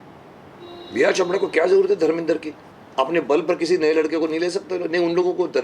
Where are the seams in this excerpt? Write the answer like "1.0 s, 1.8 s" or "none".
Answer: none